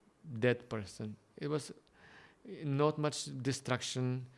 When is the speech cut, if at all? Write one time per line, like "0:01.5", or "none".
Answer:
none